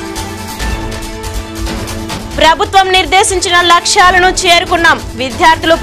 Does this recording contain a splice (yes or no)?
no